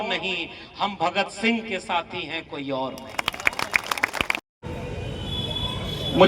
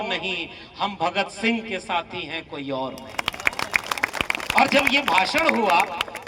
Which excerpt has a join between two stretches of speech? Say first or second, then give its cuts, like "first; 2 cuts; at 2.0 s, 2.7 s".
first; 1 cut; at 4.4 s